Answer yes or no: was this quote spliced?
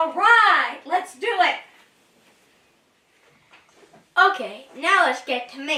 no